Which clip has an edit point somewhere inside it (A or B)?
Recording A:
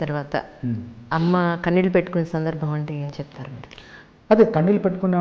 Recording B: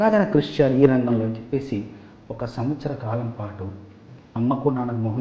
B